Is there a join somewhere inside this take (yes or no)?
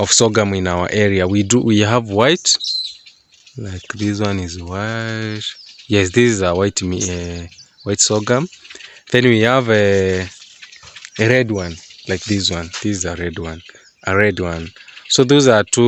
no